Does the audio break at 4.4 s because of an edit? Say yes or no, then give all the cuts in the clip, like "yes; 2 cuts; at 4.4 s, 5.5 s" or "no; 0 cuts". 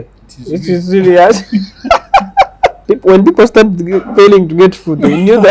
no; 1 cut; at 2.8 s